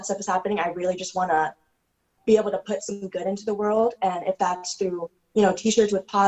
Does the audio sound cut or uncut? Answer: uncut